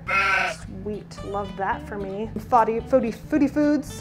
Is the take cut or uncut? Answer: cut